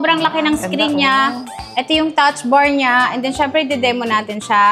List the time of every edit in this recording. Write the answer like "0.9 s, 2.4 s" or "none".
none